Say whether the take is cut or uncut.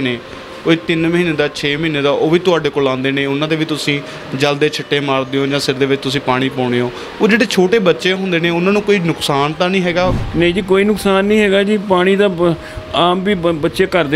cut